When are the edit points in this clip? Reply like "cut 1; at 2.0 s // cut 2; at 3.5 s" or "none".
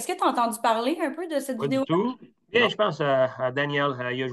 cut 1; at 2.3 s